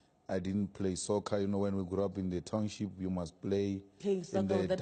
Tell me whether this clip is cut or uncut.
uncut